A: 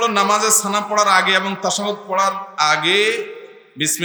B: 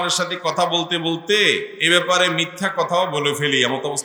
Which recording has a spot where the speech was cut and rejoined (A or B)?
B